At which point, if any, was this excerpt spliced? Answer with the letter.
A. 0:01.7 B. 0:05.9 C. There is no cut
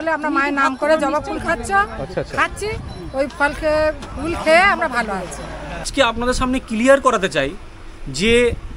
B